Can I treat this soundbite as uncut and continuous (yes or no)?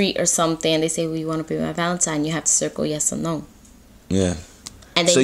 yes